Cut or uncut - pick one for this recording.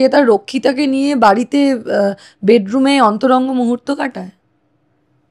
uncut